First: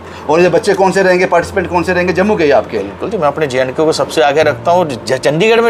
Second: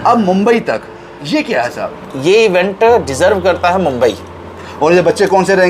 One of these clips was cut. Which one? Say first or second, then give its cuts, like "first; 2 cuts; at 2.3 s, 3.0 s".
second; 1 cut; at 2.1 s